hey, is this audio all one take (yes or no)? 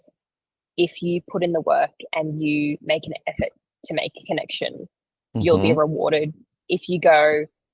yes